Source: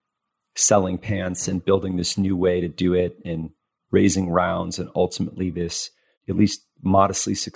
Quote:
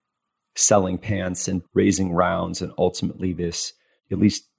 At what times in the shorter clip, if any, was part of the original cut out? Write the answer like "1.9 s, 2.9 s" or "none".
1.6 s